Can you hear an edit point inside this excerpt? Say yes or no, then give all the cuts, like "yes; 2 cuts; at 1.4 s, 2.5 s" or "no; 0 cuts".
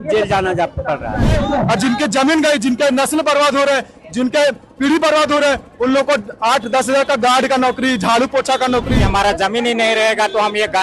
yes; 2 cuts; at 1.4 s, 9.0 s